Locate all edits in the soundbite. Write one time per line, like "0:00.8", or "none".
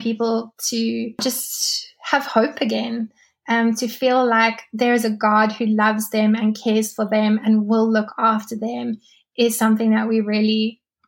0:01.2